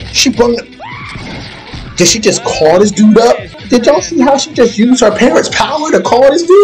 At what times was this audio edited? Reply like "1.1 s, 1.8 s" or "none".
3.5 s